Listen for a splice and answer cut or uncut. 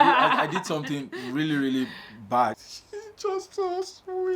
cut